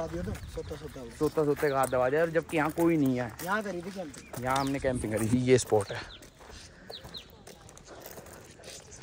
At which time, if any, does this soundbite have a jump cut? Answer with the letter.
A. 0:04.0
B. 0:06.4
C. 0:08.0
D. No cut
D